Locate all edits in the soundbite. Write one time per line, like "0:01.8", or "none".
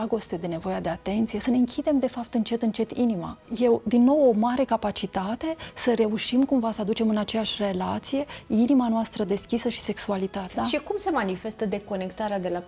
0:03.5
0:10.4